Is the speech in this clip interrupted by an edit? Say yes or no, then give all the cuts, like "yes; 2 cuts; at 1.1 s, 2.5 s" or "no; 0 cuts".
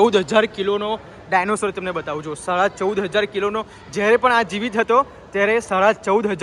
no; 0 cuts